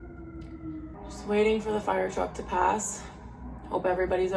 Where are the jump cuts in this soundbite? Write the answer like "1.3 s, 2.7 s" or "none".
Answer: 0.9 s